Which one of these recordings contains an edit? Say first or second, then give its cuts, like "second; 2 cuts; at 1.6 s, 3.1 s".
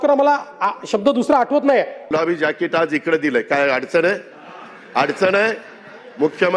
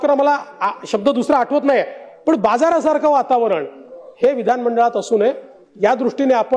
first; 1 cut; at 2.1 s